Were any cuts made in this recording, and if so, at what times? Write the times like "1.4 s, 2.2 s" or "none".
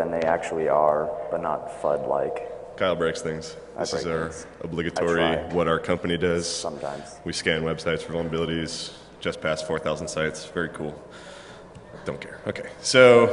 6.5 s